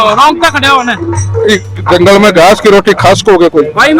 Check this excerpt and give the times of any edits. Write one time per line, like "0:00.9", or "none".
none